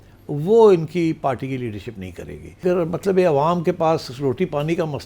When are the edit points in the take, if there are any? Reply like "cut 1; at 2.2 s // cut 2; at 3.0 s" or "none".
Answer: cut 1; at 2.6 s